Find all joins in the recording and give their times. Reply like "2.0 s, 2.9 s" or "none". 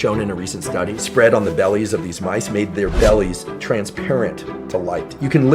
0.9 s